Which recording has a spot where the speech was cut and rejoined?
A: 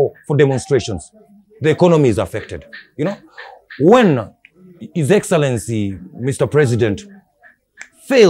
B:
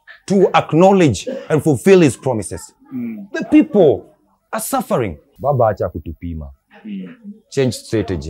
B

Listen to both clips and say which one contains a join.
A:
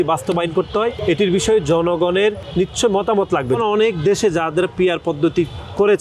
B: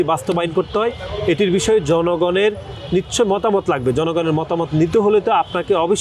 A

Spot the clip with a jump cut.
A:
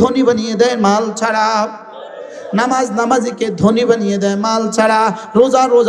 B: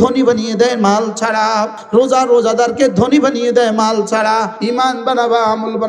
B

